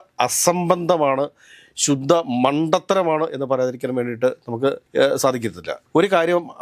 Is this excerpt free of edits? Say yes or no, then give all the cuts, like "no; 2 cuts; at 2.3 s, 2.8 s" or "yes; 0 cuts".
yes; 0 cuts